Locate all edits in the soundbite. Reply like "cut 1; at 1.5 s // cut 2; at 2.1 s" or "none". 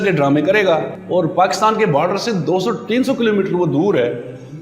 cut 1; at 1.0 s